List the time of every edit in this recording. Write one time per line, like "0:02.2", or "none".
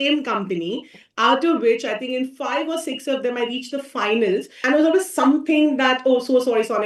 0:04.5